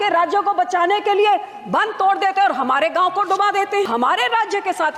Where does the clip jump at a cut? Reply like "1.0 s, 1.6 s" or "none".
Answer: 3.8 s